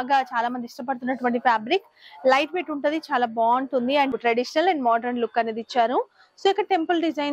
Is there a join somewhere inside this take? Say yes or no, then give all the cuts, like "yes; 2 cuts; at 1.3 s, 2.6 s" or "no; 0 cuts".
yes; 1 cut; at 4.1 s